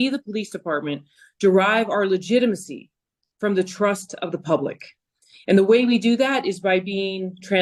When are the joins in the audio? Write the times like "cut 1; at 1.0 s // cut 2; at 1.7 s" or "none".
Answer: none